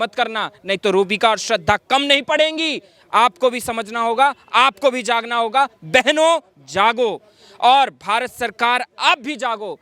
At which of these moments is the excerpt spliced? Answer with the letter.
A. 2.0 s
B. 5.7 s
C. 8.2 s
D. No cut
D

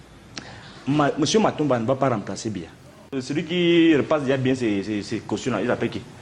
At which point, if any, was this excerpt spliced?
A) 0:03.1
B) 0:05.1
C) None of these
A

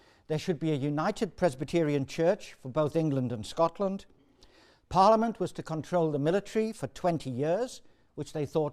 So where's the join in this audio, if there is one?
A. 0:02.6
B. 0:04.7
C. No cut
B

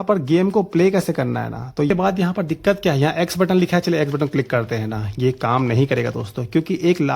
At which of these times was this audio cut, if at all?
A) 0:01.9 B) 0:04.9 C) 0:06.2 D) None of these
A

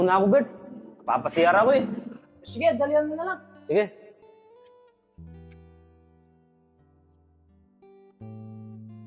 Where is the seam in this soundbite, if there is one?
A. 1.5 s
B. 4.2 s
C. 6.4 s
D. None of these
B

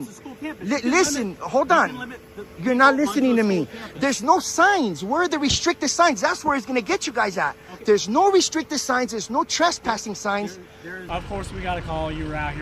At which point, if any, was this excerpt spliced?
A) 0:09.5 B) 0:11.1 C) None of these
B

